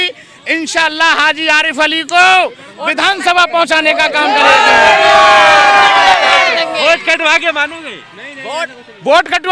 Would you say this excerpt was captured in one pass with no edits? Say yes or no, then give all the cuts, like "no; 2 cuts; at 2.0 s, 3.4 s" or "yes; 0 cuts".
yes; 0 cuts